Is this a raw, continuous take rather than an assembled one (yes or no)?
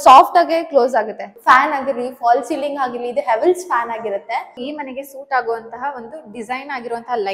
no